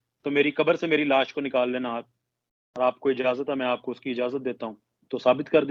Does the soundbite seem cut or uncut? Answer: uncut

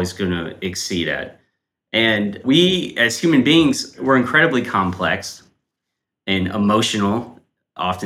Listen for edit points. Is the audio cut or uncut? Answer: cut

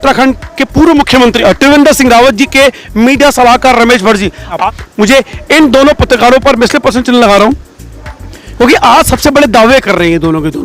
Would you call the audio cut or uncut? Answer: cut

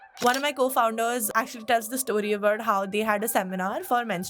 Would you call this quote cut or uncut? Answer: cut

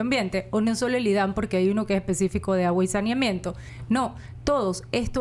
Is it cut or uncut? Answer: cut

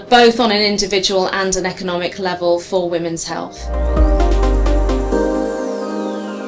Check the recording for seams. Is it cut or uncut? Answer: cut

